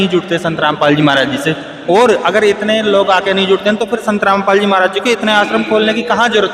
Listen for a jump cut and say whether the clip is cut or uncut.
uncut